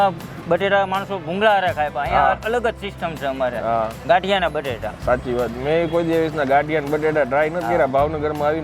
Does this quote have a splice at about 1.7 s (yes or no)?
no